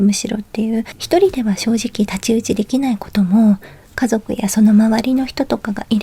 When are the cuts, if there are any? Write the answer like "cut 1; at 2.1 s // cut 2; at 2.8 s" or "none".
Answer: cut 1; at 0.9 s